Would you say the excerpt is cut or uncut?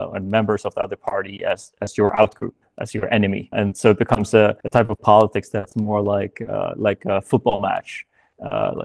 cut